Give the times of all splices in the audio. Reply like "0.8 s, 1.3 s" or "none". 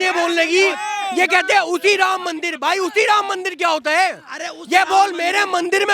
none